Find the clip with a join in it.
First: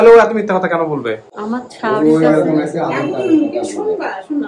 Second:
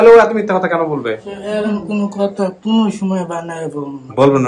second; 1 cut; at 1.3 s

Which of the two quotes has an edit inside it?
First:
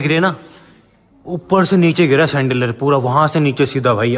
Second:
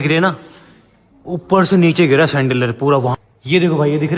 second; 1 cut; at 3.1 s

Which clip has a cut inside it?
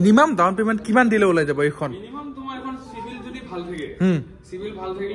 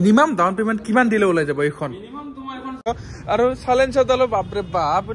second; 1 cut; at 2.9 s

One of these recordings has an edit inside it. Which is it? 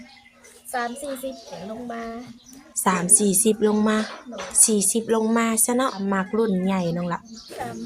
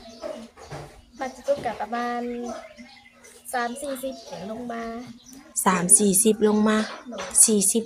first; 1 cut; at 6.0 s

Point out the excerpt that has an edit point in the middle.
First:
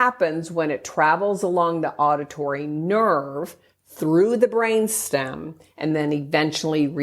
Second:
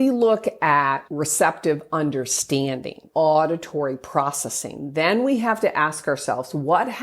second; 2 cuts; at 1.1 s, 3.0 s

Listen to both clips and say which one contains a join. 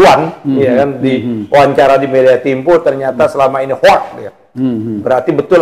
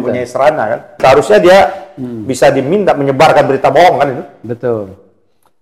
second; 1 cut; at 1.0 s

